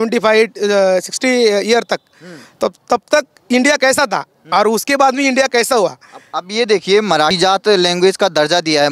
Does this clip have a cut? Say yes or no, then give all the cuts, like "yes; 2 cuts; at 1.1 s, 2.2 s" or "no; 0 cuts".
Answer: yes; 1 cut; at 7.3 s